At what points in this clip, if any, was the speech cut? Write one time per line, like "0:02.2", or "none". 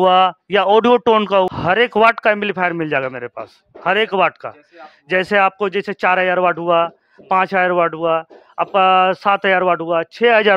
0:01.5